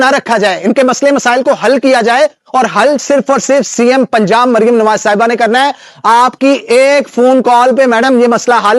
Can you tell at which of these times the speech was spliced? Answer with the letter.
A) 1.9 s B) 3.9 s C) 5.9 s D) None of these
D